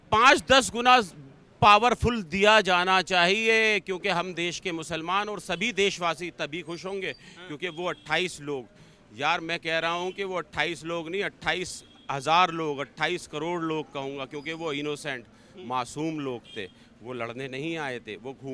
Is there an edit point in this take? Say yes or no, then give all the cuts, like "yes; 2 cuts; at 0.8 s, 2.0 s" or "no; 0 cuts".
no; 0 cuts